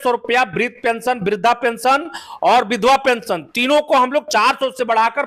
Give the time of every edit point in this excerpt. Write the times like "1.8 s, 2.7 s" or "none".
none